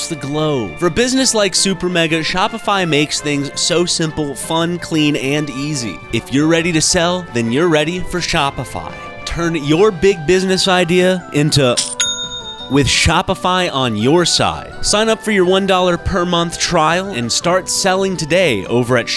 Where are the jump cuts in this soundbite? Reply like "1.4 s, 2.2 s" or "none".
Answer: 6.0 s, 9.2 s